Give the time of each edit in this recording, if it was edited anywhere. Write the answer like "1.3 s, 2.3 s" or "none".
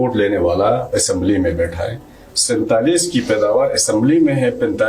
none